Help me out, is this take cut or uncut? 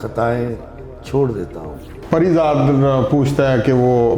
cut